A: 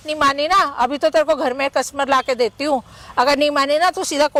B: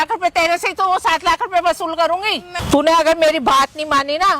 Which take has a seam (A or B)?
B